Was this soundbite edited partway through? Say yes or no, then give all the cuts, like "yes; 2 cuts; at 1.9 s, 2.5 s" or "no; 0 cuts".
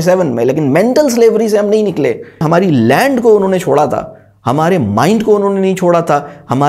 yes; 1 cut; at 2.4 s